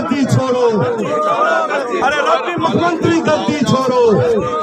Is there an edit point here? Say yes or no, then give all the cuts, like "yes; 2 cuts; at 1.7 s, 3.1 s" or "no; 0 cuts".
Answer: no; 0 cuts